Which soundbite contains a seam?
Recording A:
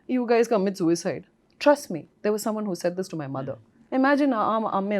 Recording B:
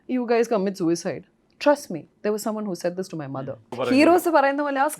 B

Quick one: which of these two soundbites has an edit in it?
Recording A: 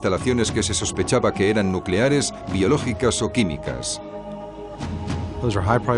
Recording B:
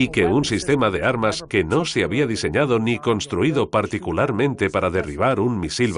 B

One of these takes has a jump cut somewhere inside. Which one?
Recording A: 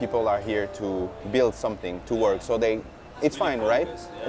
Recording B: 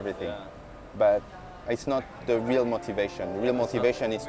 A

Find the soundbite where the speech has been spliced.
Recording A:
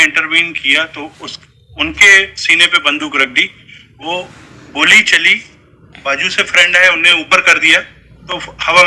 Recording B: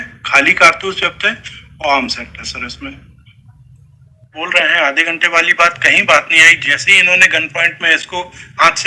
B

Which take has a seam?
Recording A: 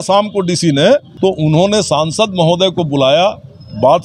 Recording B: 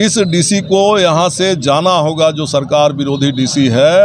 A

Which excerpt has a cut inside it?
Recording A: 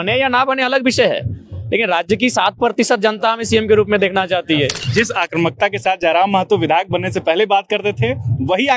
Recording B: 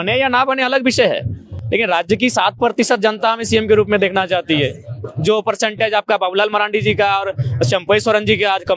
A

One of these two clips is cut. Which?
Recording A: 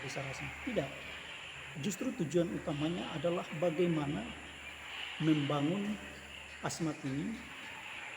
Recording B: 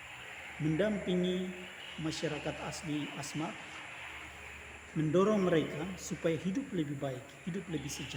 A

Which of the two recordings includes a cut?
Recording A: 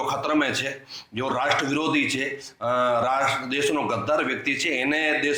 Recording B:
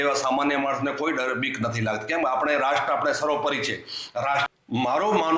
B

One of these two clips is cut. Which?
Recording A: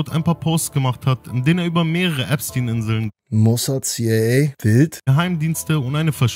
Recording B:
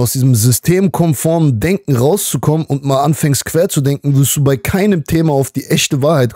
A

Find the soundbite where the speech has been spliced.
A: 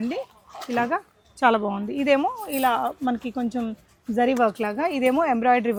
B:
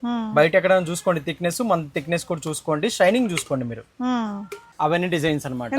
B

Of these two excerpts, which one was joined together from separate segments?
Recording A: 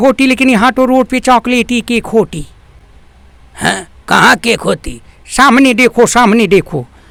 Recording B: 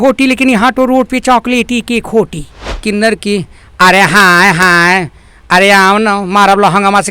B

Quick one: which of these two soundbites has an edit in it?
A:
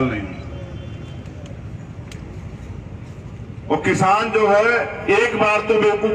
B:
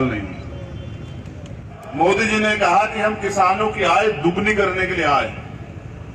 B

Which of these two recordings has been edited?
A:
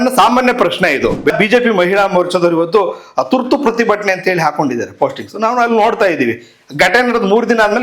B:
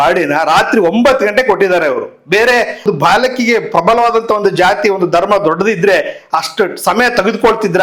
A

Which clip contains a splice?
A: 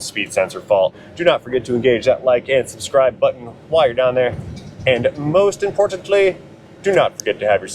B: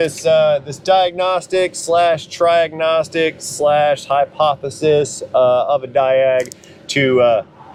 A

